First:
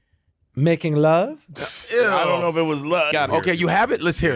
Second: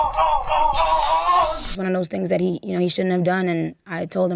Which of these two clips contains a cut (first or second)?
second